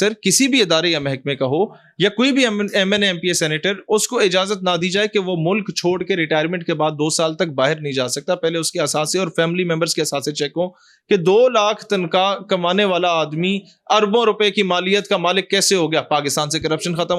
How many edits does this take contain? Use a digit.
0